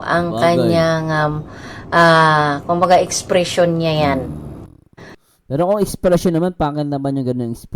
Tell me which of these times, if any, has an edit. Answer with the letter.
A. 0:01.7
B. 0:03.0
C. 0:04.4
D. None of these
C